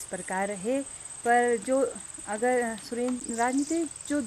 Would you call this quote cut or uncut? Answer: cut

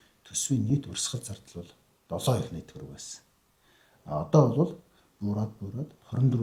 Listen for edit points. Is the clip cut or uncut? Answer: uncut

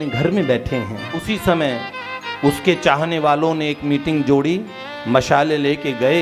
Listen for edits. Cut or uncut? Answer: cut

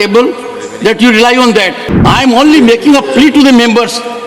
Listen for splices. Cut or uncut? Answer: cut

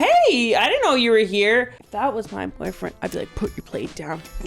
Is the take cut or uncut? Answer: cut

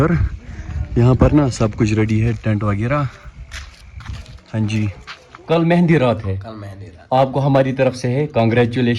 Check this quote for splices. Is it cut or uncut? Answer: cut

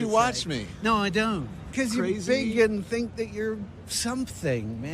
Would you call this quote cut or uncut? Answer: cut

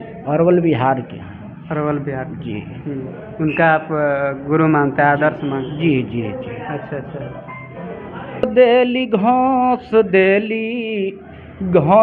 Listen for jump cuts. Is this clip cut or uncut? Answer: cut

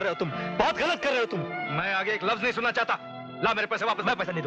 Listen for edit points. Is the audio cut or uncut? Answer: uncut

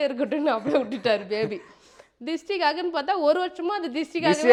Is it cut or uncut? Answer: uncut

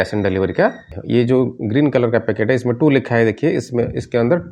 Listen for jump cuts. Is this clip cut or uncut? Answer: cut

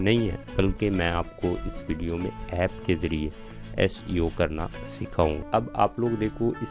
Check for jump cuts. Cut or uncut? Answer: cut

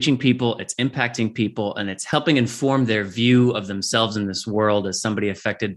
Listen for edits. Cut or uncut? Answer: cut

